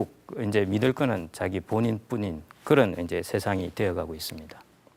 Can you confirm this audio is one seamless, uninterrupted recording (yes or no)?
yes